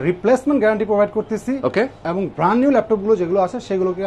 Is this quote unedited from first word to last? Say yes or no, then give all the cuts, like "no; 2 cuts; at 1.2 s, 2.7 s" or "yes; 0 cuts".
yes; 0 cuts